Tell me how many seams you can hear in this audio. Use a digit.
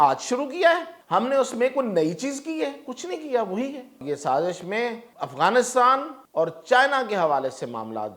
4